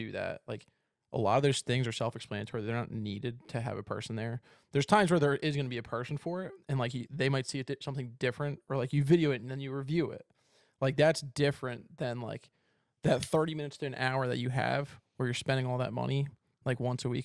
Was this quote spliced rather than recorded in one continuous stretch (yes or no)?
no